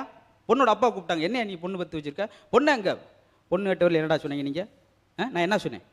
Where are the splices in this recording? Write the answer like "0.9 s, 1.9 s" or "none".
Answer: none